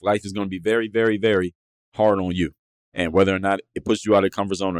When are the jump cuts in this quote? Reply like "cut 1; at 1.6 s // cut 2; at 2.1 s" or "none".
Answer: none